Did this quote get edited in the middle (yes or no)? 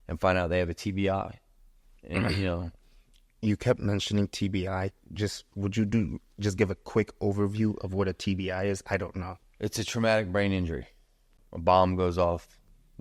yes